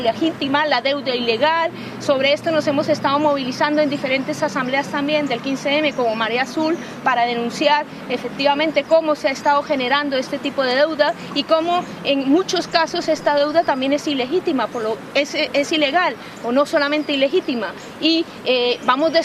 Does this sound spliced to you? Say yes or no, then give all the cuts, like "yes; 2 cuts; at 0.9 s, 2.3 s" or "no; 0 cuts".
no; 0 cuts